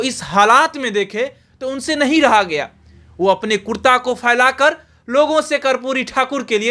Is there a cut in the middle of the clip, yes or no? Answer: no